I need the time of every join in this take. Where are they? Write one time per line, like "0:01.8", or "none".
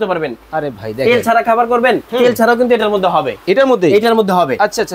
none